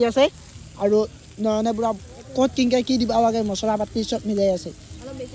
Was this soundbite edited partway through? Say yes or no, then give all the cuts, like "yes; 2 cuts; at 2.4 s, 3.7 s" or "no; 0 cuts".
no; 0 cuts